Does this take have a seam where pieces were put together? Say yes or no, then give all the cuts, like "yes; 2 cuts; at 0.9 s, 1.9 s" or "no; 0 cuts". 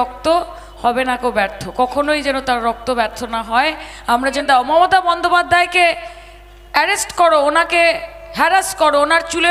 yes; 1 cut; at 4.4 s